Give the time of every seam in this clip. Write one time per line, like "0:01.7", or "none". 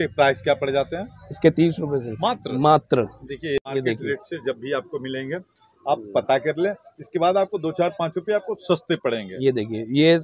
0:03.6